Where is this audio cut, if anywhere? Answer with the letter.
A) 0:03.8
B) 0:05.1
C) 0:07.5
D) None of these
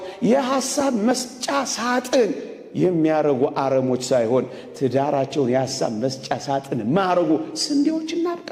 D